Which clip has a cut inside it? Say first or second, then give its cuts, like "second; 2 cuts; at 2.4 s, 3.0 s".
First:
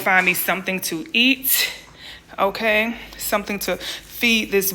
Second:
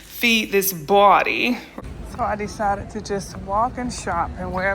second; 1 cut; at 1.7 s